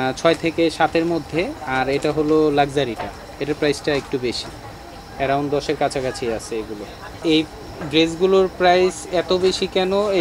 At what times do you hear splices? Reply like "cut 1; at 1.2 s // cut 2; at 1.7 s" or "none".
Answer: cut 1; at 7.1 s